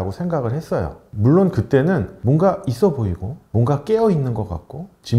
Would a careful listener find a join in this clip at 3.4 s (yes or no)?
no